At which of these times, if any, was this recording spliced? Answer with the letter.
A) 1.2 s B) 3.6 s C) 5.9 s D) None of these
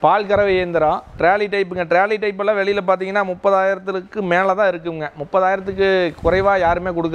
A